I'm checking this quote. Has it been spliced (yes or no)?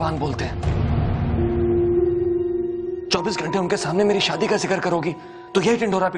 yes